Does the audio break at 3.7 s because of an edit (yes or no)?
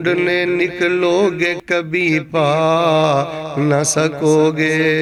no